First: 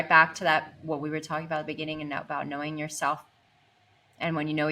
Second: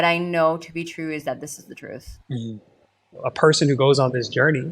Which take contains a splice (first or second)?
second